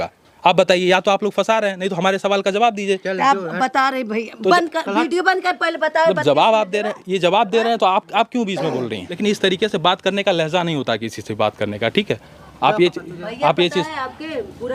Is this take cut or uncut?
uncut